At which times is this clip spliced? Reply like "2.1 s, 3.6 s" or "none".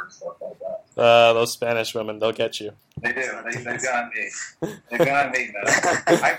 2.9 s